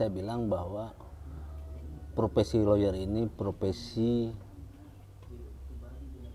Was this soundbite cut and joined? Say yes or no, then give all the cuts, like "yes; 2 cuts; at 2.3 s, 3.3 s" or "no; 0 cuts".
no; 0 cuts